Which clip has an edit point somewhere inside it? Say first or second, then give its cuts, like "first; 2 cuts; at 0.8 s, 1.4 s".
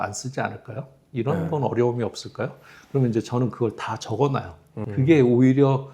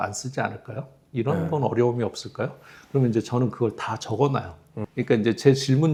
first; 1 cut; at 4.8 s